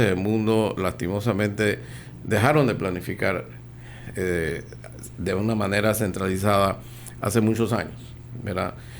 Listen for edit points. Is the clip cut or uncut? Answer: uncut